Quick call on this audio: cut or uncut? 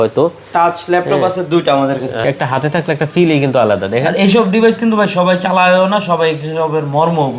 cut